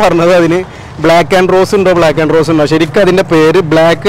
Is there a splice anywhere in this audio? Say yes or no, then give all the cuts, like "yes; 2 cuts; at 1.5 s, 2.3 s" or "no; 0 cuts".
no; 0 cuts